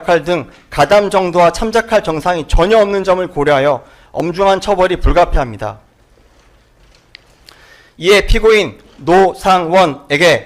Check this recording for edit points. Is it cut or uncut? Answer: uncut